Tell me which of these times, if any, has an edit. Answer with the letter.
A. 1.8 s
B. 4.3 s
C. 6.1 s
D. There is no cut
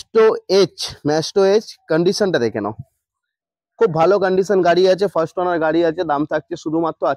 D